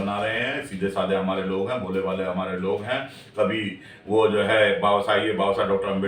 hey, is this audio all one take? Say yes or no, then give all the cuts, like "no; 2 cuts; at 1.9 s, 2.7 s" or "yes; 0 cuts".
yes; 0 cuts